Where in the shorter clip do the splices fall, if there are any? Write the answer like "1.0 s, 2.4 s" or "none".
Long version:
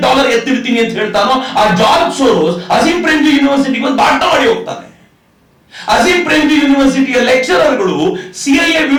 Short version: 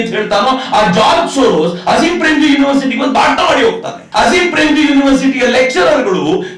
3.9 s